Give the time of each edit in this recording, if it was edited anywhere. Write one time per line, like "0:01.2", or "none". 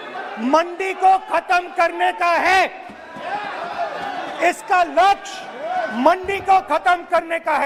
none